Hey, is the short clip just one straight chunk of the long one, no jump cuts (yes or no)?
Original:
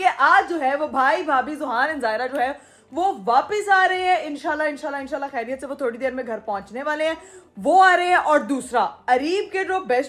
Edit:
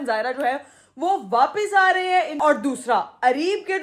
no